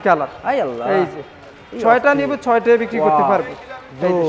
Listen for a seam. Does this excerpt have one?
no; 0 cuts

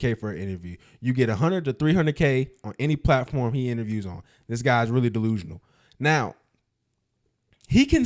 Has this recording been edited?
no; 0 cuts

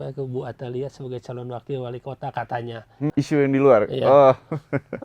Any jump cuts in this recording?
yes; 1 cut; at 3.1 s

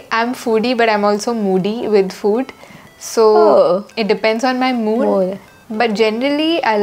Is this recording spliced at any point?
no; 0 cuts

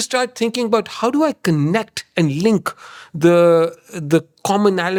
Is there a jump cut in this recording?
no; 0 cuts

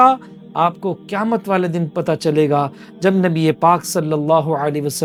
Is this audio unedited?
yes; 0 cuts

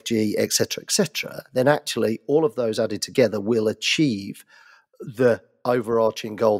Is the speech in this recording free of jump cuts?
no; 1 cut; at 5.5 s

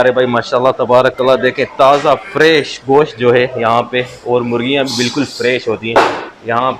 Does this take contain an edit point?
no; 0 cuts

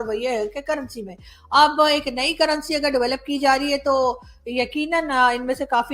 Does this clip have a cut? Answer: no; 0 cuts

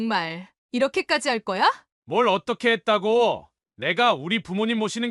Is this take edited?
no; 0 cuts

